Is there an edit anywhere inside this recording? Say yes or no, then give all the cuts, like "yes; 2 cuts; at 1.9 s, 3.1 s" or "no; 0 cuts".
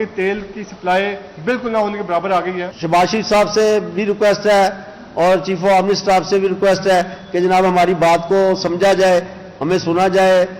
yes; 1 cut; at 2.6 s